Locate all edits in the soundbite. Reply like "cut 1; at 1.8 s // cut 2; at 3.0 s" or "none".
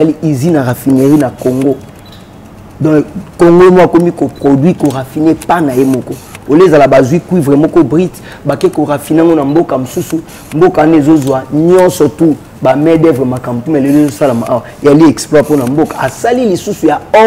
none